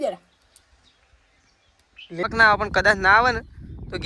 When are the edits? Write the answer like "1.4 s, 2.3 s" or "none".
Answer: 2.3 s